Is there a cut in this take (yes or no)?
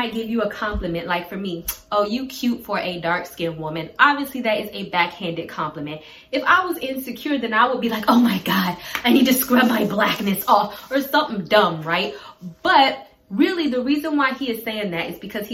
no